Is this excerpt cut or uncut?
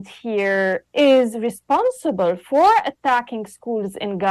uncut